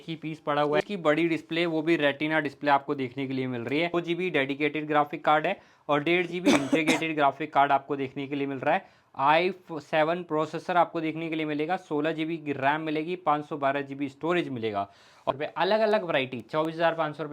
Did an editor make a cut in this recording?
yes; 3 cuts; at 0.8 s, 3.9 s, 15.3 s

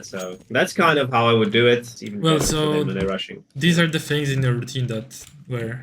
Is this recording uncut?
no; 1 cut; at 2.0 s

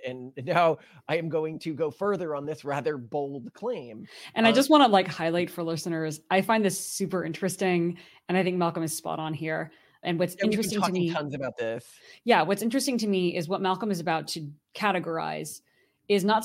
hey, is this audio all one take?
yes; 0 cuts

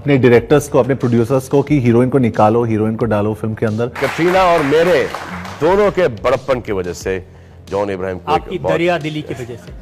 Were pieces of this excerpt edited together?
yes; 1 cut; at 3.9 s

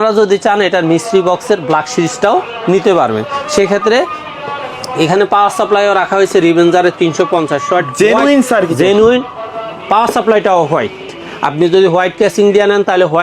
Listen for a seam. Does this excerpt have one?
no; 0 cuts

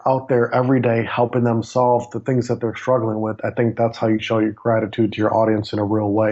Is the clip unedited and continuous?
yes; 0 cuts

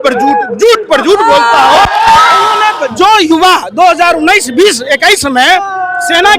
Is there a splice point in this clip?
yes; 1 cut; at 2.6 s

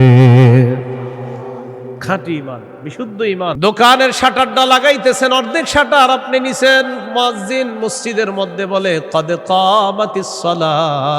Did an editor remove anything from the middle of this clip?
yes; 1 cut; at 3.6 s

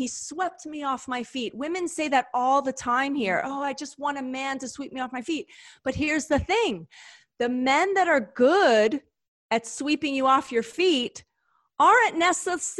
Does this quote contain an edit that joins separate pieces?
no; 0 cuts

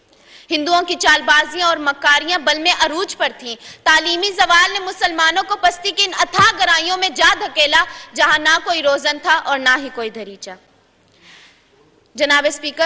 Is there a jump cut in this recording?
no; 0 cuts

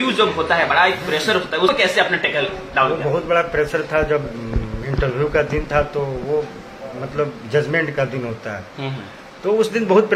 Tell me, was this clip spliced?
yes; 1 cut; at 1.7 s

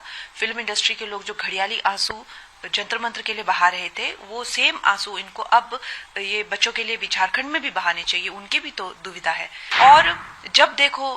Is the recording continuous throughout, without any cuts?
no; 1 cut; at 9.6 s

